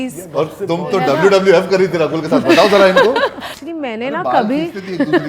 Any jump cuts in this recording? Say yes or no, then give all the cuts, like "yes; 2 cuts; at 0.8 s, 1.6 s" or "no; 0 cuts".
yes; 1 cut; at 3.6 s